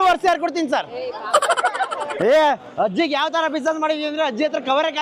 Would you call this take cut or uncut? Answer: cut